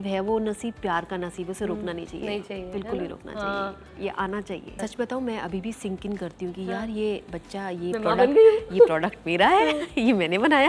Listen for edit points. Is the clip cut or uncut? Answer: uncut